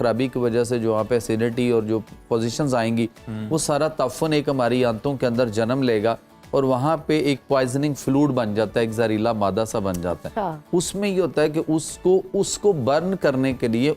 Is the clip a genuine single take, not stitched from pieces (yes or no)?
yes